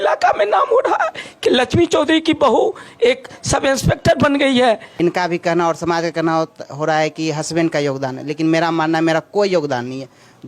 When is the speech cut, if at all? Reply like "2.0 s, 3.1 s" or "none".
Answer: 4.9 s